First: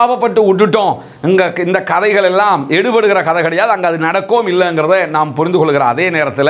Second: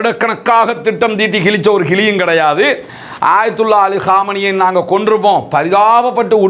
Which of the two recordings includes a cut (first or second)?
second